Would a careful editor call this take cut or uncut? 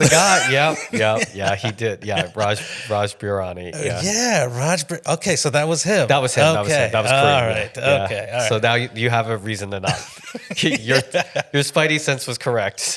uncut